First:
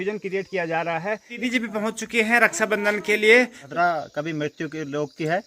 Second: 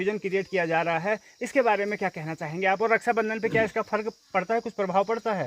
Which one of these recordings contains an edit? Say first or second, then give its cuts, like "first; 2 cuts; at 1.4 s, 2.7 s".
first; 2 cuts; at 1.4 s, 3.6 s